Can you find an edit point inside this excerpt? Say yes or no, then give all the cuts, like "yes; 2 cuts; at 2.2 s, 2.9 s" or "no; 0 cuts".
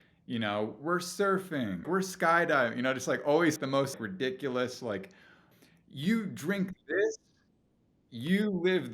yes; 3 cuts; at 1.9 s, 3.8 s, 5.5 s